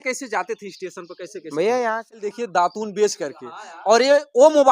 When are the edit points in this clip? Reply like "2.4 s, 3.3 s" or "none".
2.2 s